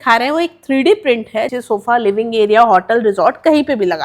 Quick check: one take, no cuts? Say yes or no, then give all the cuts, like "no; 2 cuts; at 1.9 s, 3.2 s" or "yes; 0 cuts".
no; 1 cut; at 1.6 s